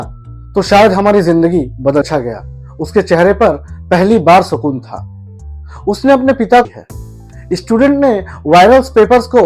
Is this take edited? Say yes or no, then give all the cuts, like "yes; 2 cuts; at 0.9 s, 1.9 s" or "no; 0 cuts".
yes; 2 cuts; at 2.1 s, 6.7 s